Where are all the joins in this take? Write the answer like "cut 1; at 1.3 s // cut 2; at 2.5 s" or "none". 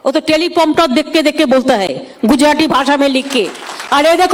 none